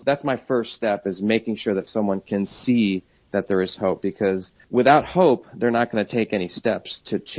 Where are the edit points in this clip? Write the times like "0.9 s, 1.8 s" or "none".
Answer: none